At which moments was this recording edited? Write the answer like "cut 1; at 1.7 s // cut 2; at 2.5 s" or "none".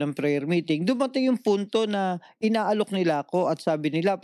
none